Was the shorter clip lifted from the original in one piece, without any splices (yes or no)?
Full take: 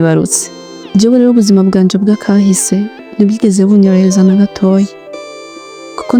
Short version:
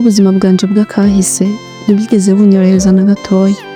yes